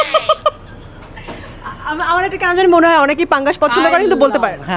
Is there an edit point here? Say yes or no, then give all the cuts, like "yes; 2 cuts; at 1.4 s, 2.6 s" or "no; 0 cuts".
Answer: no; 0 cuts